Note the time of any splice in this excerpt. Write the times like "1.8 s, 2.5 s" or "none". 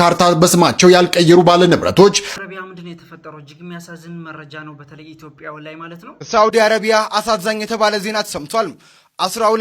2.3 s, 6.1 s